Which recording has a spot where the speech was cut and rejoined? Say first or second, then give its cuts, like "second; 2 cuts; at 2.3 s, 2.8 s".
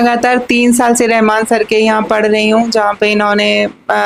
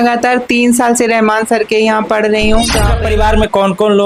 second; 1 cut; at 2.9 s